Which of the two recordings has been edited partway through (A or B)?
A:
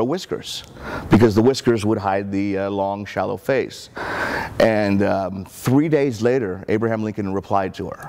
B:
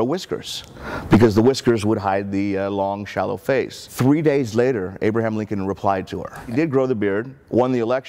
B